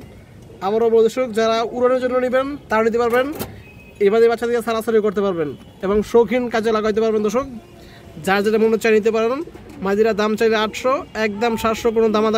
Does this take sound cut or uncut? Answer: uncut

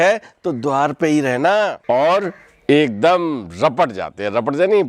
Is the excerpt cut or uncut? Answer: cut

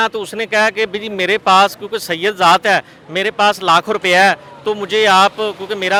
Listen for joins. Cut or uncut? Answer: uncut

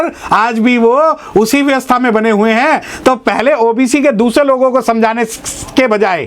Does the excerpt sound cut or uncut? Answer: uncut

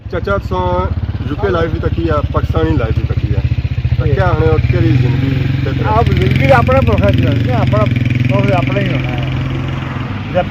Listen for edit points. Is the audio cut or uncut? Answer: uncut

